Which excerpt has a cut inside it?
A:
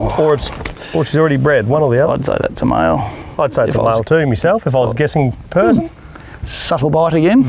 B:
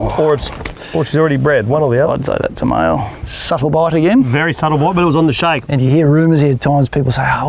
B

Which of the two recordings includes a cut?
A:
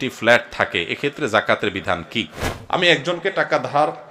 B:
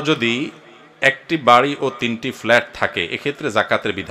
A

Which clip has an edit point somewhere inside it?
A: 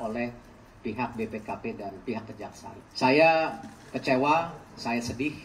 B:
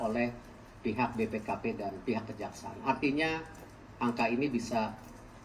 A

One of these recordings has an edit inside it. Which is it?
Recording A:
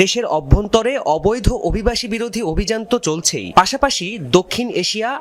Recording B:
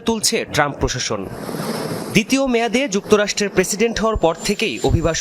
B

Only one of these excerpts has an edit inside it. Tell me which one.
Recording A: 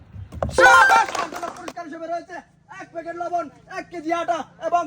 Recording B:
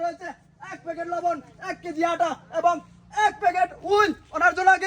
A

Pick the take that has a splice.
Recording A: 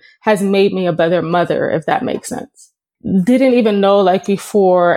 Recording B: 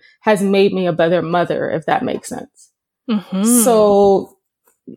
A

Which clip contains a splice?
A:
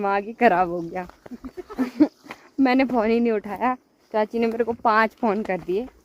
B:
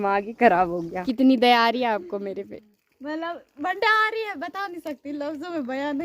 B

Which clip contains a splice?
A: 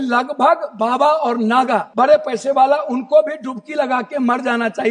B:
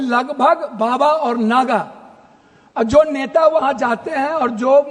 A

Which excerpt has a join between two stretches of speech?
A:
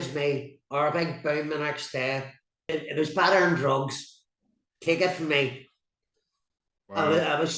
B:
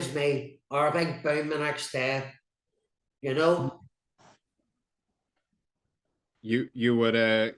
A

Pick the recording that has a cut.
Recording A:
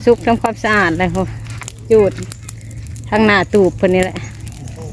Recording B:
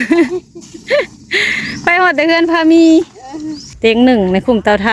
B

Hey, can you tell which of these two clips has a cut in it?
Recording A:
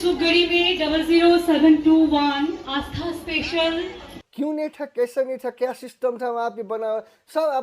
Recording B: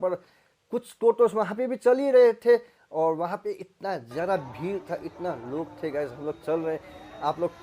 A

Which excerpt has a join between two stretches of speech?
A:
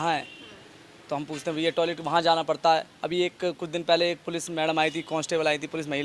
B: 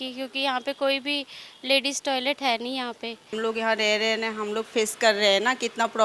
B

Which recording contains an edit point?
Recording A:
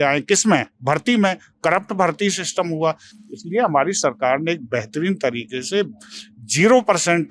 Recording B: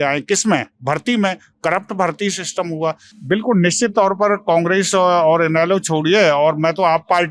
B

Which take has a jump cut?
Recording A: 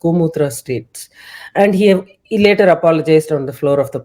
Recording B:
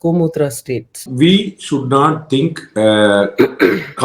B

